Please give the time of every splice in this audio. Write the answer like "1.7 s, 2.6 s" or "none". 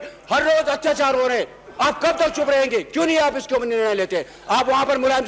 none